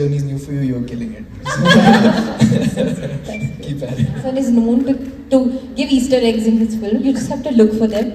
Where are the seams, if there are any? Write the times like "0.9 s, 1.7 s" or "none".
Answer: 4.2 s